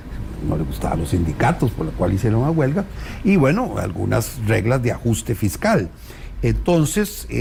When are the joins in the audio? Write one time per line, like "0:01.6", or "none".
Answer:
none